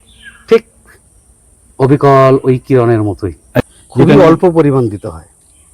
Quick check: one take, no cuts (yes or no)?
no